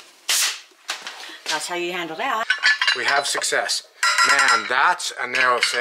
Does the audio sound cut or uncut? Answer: cut